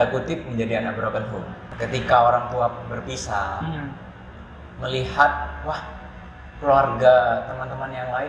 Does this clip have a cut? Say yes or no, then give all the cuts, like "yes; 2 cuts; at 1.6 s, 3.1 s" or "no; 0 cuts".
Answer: yes; 1 cut; at 1.6 s